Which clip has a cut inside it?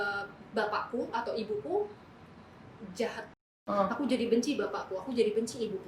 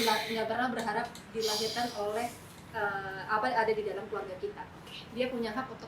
first; 1 cut; at 3.3 s

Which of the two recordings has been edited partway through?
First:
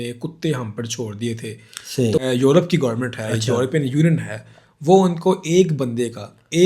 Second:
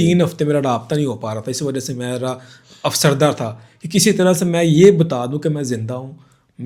first; 1 cut; at 2.2 s

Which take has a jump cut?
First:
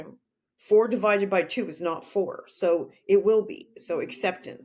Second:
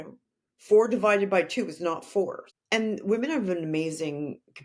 second; 1 cut; at 2.4 s

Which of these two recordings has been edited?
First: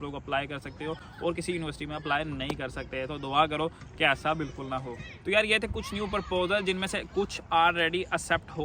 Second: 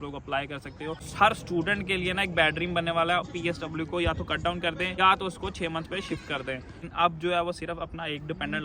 second; 4 cuts; at 1.0 s, 3.3 s, 5.0 s, 6.8 s

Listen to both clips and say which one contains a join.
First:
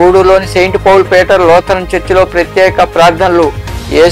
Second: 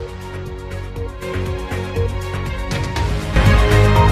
second; 1 cut; at 1.4 s

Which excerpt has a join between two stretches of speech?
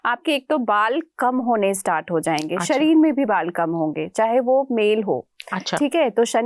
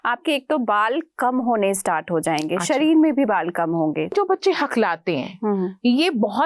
second; 1 cut; at 4.1 s

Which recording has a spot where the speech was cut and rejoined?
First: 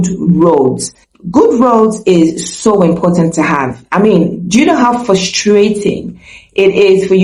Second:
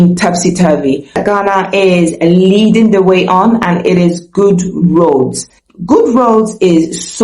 second; 1 cut; at 1.2 s

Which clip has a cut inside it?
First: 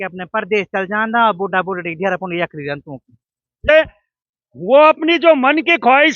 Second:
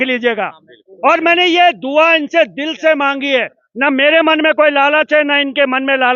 first; 1 cut; at 3.7 s

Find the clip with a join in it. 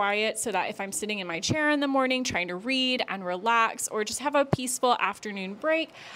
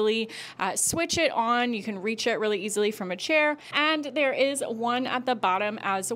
second; 1 cut; at 3.7 s

